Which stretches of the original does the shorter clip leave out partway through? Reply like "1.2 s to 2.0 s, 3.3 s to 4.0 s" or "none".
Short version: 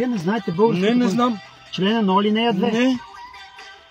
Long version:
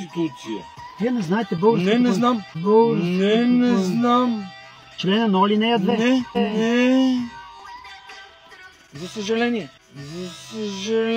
2.5 s to 4.7 s, 6.3 s to 7.5 s